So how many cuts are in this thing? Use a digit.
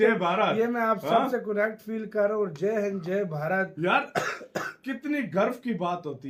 0